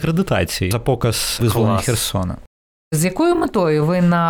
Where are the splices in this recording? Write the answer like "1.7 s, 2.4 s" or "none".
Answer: 0.9 s, 2.9 s